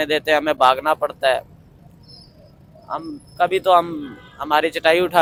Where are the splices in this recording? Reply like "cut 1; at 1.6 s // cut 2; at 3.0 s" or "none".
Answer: none